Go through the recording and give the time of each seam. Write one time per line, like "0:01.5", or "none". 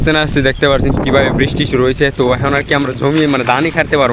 none